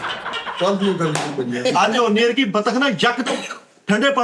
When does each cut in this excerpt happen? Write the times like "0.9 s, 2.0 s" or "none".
1.6 s